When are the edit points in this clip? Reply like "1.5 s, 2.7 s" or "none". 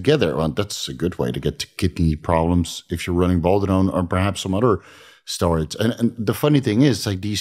none

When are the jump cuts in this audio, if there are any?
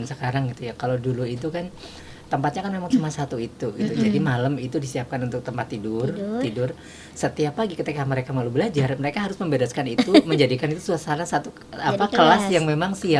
none

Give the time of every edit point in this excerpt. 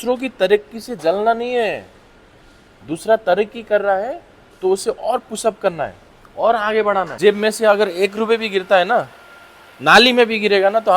7.1 s

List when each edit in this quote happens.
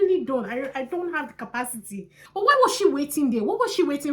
2.2 s

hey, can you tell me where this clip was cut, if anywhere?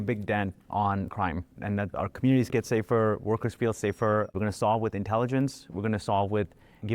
1.9 s, 4.3 s

